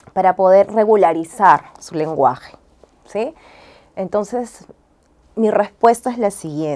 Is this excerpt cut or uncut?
uncut